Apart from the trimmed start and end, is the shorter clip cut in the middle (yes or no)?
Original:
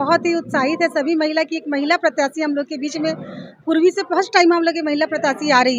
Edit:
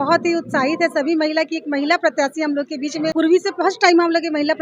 yes